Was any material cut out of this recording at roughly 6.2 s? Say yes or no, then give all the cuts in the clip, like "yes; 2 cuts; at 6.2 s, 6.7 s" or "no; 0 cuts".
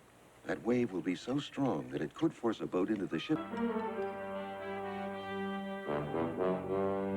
no; 1 cut; at 3.4 s